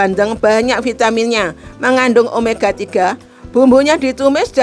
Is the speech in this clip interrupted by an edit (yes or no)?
no